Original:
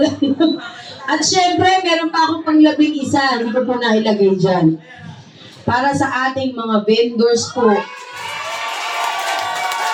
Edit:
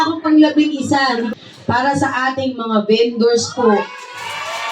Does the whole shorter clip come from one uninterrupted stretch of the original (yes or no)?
no